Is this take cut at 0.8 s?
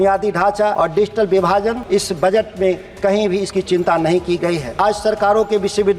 yes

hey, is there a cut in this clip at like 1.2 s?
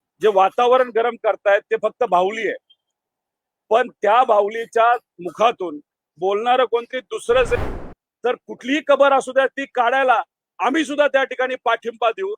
no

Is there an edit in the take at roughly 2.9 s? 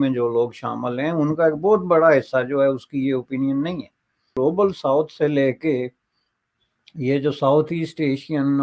no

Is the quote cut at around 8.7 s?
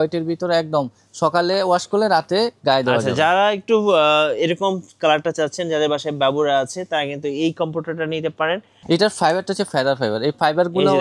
yes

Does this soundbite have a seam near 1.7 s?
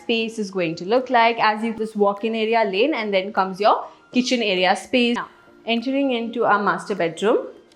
yes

